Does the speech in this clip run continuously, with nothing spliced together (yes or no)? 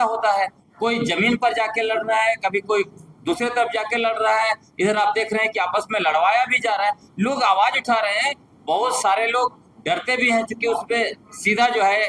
yes